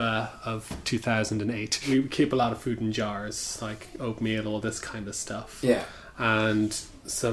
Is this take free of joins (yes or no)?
no